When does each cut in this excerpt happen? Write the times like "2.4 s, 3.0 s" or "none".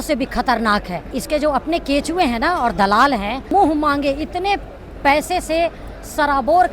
1.1 s, 3.5 s